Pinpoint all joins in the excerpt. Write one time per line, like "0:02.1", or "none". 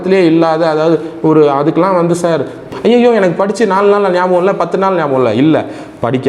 0:02.7